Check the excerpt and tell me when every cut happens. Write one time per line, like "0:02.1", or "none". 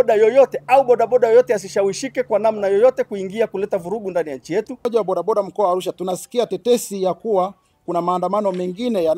0:04.8